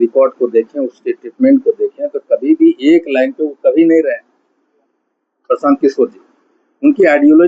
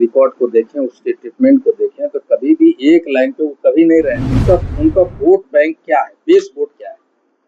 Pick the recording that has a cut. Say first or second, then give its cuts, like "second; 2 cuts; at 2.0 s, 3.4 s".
second; 1 cut; at 4.4 s